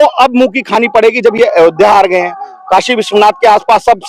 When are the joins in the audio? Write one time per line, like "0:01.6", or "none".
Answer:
none